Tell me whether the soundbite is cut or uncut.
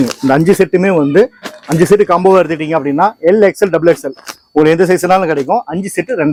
uncut